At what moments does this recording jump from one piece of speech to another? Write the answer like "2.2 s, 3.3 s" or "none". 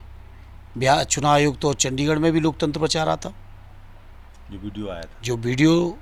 none